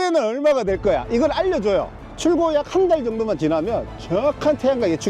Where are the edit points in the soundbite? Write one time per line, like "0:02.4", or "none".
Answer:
0:02.0